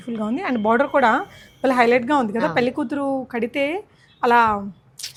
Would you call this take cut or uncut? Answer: uncut